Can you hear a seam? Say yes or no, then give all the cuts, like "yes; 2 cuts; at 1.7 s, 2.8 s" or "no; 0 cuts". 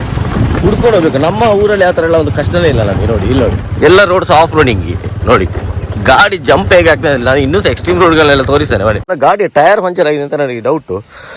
yes; 1 cut; at 9.1 s